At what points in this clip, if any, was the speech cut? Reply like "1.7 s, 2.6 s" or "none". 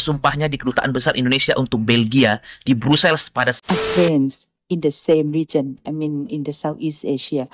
3.6 s

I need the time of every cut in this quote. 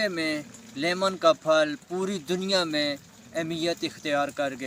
none

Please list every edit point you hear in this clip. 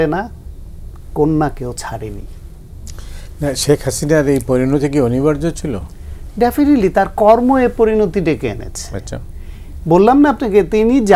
none

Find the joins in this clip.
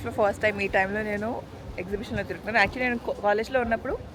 none

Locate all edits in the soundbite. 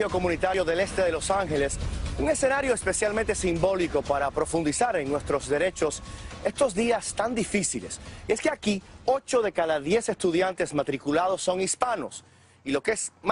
4.6 s

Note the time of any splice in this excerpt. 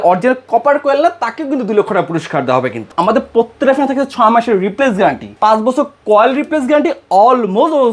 2.9 s, 5.3 s

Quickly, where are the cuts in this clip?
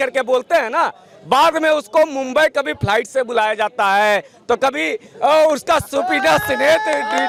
none

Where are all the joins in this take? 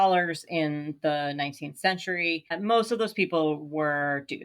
2.5 s

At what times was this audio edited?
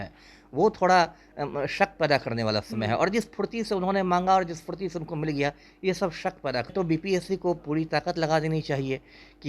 6.7 s

